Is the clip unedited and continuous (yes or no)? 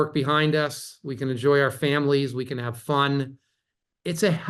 yes